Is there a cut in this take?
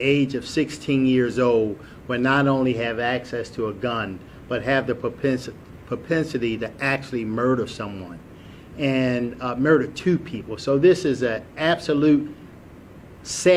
no; 0 cuts

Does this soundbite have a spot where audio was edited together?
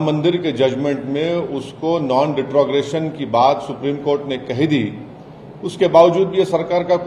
no; 0 cuts

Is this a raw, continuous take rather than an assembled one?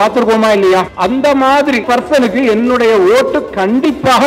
no; 2 cuts; at 0.9 s, 1.9 s

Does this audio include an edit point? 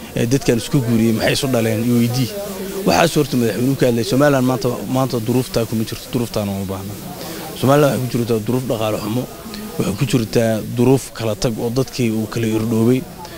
no; 0 cuts

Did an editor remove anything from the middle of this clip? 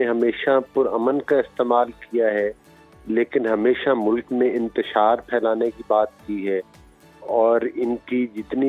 no; 0 cuts

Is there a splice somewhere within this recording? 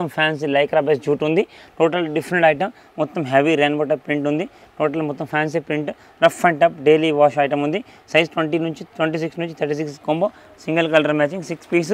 no; 0 cuts

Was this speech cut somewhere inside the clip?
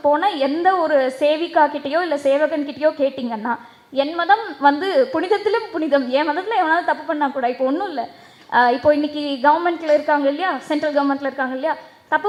no; 0 cuts

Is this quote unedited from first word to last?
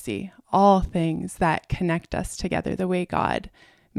yes; 0 cuts

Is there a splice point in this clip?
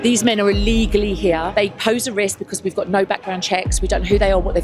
yes; 1 cut; at 1.5 s

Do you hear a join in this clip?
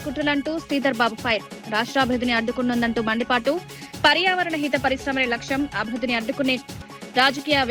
no; 0 cuts

